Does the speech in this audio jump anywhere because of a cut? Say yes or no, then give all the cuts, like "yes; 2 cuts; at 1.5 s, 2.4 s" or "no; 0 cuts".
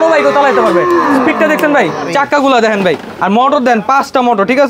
yes; 1 cut; at 2.1 s